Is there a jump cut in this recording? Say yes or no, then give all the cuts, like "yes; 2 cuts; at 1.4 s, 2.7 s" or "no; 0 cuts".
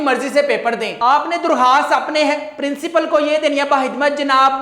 no; 0 cuts